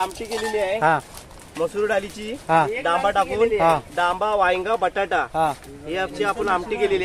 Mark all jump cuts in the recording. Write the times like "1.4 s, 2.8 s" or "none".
none